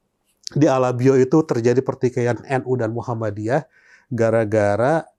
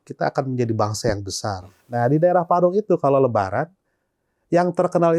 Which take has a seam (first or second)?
second